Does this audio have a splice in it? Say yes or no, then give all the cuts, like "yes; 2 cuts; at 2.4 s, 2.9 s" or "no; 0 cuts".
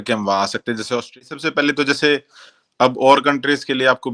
yes; 1 cut; at 1.2 s